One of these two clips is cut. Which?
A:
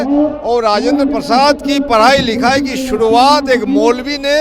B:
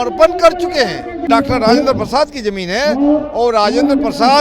B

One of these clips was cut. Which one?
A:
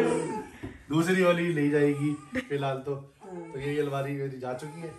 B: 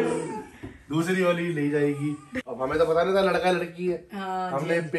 B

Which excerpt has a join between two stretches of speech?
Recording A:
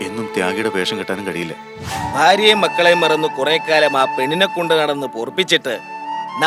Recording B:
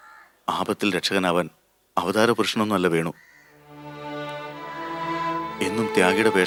A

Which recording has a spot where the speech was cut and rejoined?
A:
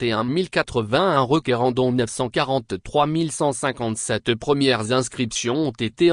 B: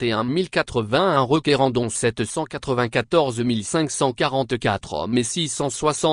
B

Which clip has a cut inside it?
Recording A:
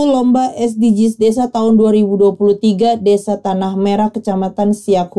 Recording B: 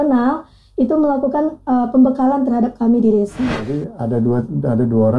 B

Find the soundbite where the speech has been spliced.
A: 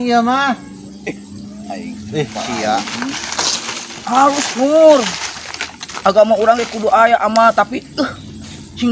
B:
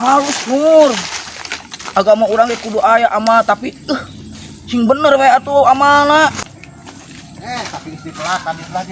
B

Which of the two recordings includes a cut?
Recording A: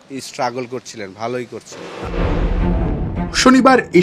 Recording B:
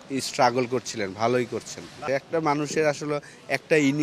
B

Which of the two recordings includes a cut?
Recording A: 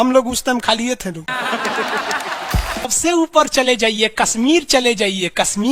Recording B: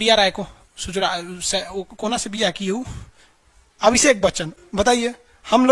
A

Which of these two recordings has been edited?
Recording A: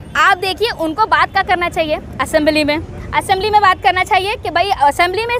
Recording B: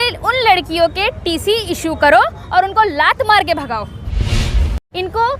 B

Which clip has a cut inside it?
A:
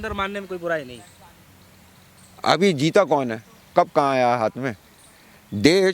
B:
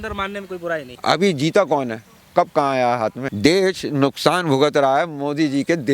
B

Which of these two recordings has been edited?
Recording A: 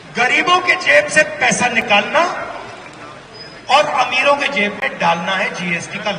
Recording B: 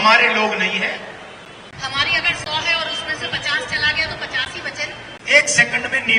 B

